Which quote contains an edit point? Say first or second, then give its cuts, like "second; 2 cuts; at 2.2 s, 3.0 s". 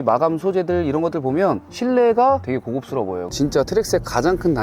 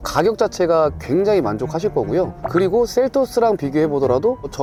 first; 1 cut; at 3.2 s